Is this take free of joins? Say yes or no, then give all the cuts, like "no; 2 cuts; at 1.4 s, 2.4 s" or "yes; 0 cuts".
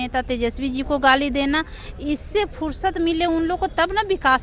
yes; 0 cuts